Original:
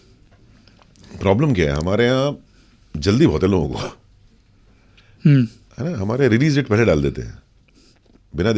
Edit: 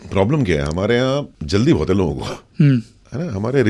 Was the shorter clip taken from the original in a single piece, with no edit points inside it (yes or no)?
no